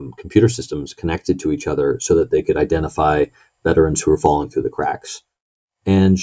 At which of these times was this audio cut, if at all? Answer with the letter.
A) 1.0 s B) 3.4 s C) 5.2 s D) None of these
D